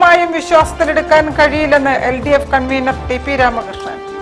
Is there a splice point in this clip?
no; 0 cuts

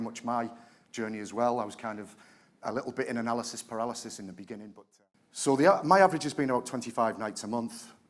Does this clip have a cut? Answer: yes; 1 cut; at 4.7 s

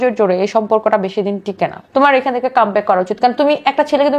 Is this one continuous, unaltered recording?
no; 1 cut; at 1.8 s

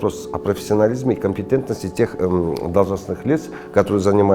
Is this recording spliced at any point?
no; 0 cuts

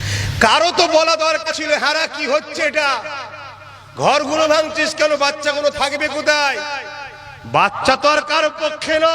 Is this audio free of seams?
no; 1 cut; at 1.5 s

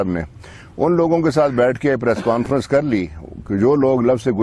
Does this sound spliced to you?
no; 0 cuts

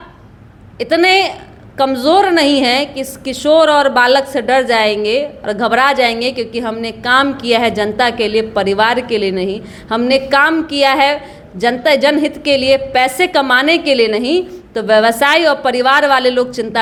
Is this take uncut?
yes; 0 cuts

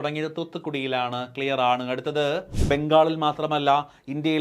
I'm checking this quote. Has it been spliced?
yes; 1 cut; at 2.6 s

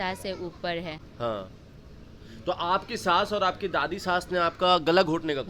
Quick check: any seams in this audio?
no; 0 cuts

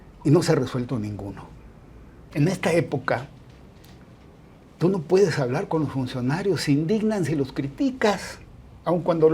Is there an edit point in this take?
yes; 1 cut; at 2.2 s

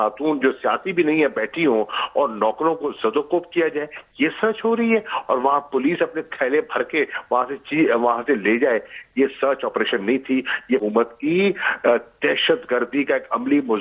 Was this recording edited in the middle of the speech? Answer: yes; 1 cut; at 10.8 s

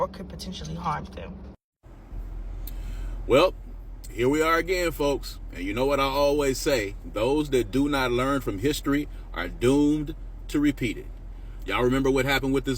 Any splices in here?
yes; 1 cut; at 1.7 s

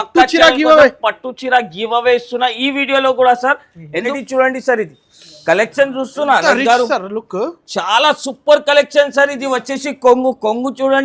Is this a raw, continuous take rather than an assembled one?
no; 1 cut; at 4.1 s

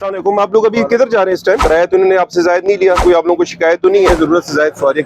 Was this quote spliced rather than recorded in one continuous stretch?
yes; 3 cuts; at 1.6 s, 3.0 s, 4.1 s

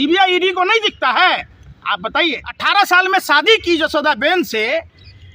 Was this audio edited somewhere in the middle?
yes; 1 cut; at 2.5 s

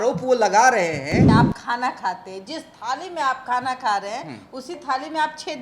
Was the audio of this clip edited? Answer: yes; 1 cut; at 1.2 s

